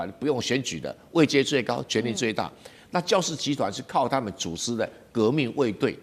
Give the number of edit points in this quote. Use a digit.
0